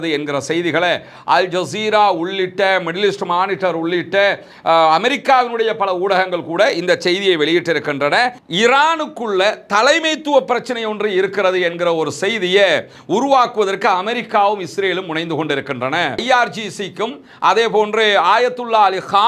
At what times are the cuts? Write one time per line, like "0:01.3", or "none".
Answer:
0:08.4

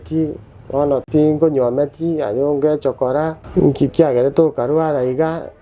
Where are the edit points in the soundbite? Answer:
0:01.1
0:03.4

